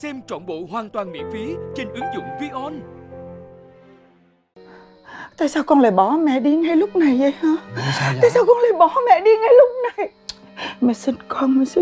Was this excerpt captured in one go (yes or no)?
no